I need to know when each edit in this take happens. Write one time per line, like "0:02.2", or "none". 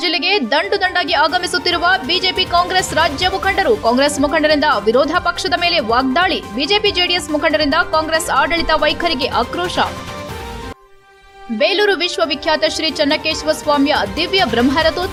none